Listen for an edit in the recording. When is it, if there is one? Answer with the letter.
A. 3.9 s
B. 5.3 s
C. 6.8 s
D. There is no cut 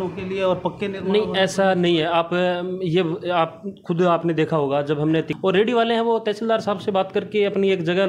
B